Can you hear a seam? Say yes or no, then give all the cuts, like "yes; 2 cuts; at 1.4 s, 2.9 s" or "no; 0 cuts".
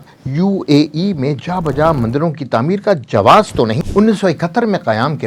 yes; 1 cut; at 3.8 s